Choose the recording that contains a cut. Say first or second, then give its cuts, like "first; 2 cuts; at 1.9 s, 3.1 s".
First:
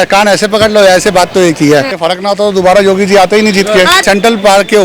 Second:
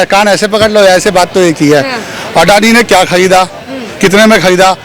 first; 2 cuts; at 1.9 s, 4.0 s